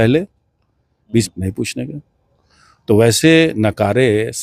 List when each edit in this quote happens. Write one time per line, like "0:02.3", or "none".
0:01.3

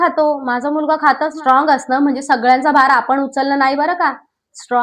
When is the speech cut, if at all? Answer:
0:01.4

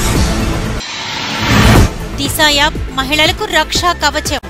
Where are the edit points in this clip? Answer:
0:01.8

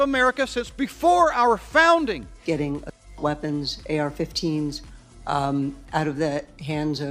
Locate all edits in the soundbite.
0:02.3

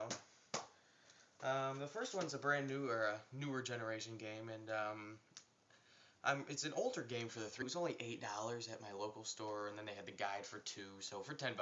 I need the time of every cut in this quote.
none

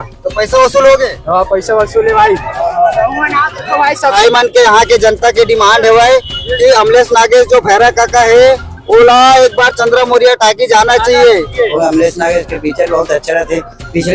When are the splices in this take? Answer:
0:04.1
0:11.7

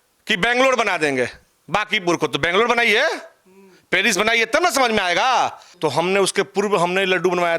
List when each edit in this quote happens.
0:05.6

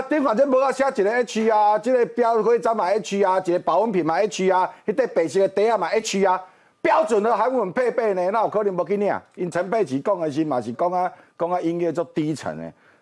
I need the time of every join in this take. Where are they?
0:09.5

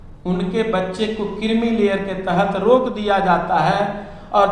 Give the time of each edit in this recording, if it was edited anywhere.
none

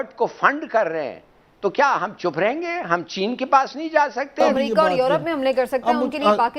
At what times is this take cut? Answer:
0:04.4

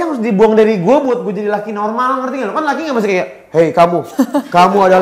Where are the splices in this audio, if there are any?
none

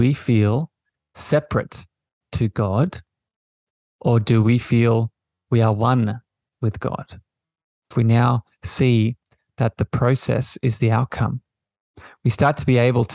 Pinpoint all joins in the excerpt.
0:07.9

